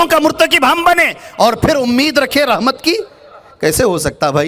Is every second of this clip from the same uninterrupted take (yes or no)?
yes